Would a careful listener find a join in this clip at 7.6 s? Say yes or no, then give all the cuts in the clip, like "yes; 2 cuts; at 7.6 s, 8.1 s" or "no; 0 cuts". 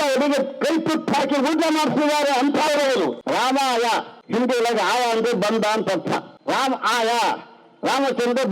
no; 3 cuts; at 3.2 s, 4.2 s, 6.3 s